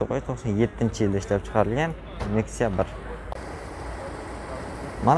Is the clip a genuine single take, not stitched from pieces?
no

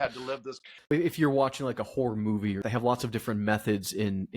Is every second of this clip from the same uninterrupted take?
no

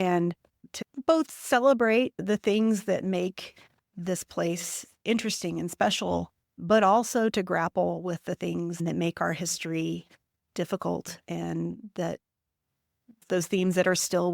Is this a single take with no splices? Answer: no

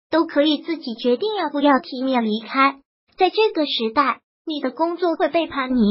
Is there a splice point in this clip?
yes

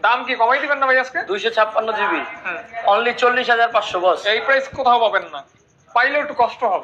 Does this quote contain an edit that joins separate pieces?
no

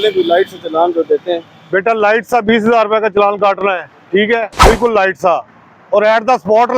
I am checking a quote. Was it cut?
yes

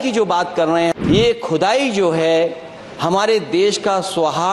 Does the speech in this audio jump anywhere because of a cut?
yes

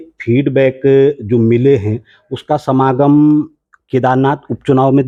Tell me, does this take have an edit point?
no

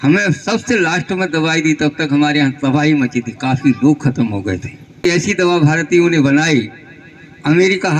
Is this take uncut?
no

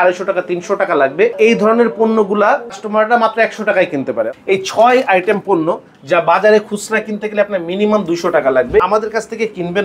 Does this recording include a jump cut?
yes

